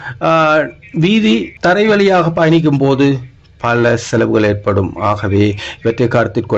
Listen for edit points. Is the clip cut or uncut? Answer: cut